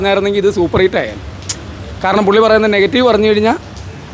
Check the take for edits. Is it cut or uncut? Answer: uncut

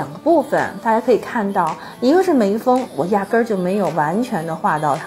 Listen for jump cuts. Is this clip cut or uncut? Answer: uncut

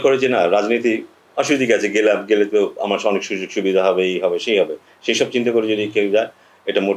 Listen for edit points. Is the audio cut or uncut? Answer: uncut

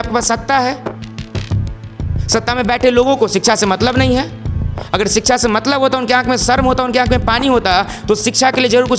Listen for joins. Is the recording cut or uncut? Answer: uncut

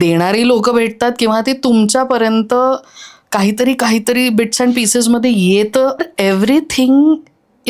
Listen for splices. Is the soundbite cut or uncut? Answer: cut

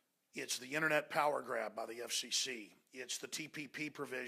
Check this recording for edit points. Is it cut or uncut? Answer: cut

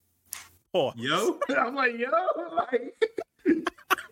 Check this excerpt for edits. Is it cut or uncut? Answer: uncut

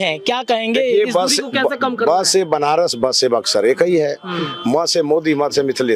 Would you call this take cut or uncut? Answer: uncut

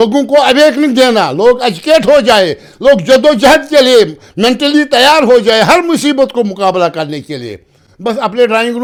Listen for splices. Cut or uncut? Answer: uncut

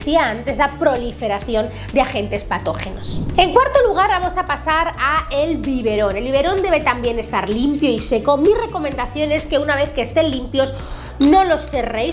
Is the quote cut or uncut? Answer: uncut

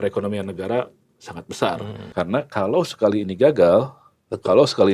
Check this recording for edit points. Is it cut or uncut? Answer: cut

